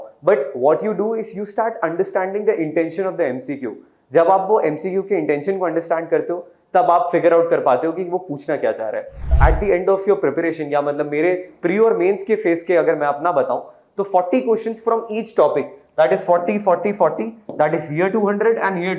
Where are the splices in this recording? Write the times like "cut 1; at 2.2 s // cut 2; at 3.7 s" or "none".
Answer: cut 1; at 9.3 s